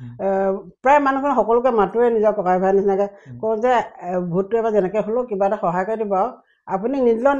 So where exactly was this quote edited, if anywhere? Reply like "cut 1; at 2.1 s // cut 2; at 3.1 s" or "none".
none

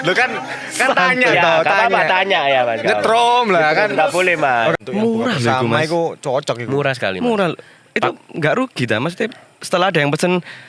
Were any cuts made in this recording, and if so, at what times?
cut 1; at 4.8 s

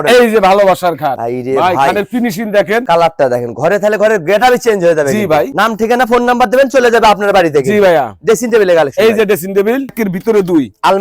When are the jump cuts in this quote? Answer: cut 1; at 2.8 s // cut 2; at 5.5 s // cut 3; at 9.9 s

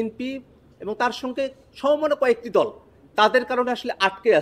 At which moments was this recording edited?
none

